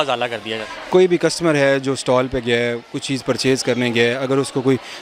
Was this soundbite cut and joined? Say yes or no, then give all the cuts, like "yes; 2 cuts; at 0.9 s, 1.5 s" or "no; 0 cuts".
no; 0 cuts